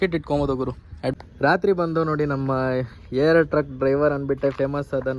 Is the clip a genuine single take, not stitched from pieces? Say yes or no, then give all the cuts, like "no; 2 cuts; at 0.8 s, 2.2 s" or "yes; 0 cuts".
no; 1 cut; at 1.1 s